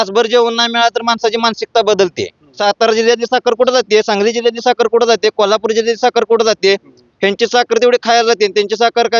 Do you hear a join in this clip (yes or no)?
yes